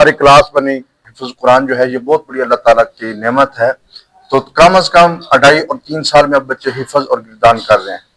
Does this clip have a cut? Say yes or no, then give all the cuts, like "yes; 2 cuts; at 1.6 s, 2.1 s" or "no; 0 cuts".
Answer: yes; 1 cut; at 1.1 s